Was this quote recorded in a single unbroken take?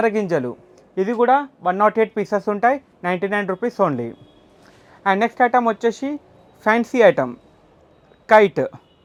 yes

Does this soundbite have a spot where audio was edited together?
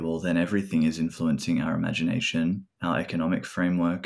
yes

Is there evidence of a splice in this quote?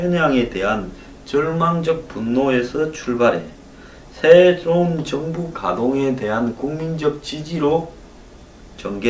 yes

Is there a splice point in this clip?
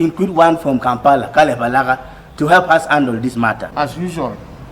yes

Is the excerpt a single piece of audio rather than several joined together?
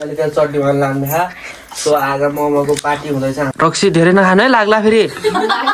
no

